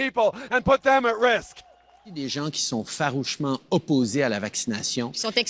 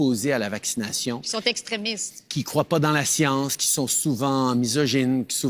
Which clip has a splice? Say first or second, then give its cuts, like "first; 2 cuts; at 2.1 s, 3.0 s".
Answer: first; 1 cut; at 1.8 s